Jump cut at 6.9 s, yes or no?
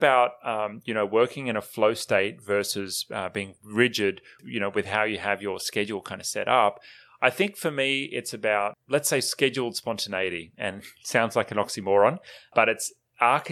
no